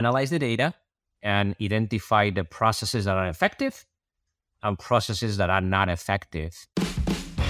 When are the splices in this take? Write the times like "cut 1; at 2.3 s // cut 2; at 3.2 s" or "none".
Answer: cut 1; at 6.6 s

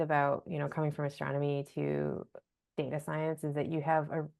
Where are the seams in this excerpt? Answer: none

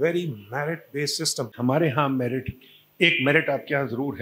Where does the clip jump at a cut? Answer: cut 1; at 1.5 s

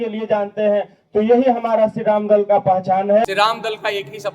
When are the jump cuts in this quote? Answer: cut 1; at 3.2 s

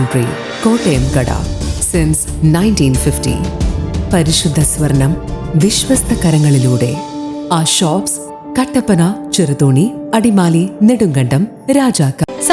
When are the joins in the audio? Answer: none

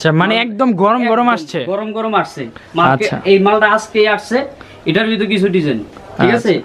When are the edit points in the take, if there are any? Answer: none

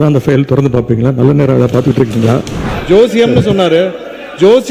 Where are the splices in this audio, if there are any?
cut 1; at 2.6 s

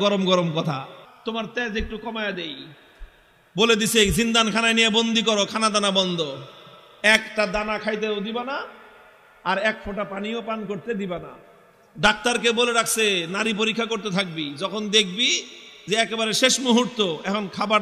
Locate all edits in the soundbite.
cut 1; at 1.0 s

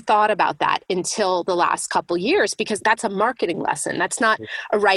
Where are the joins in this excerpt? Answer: cut 1; at 2.7 s

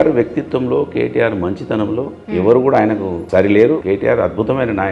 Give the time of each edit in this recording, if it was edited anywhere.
cut 1; at 3.8 s

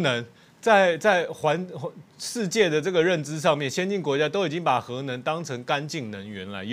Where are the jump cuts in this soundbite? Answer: none

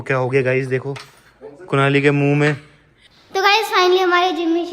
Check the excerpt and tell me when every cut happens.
cut 1; at 3.0 s

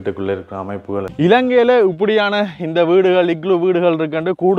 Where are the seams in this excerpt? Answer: cut 1; at 1.1 s

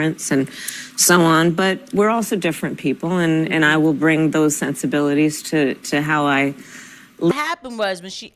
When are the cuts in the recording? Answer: cut 1; at 7.3 s

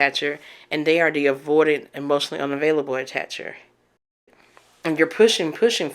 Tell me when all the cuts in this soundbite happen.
cut 1; at 4.3 s

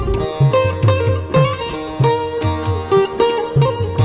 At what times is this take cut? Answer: none

